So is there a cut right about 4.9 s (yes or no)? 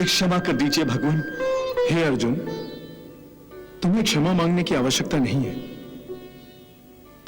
no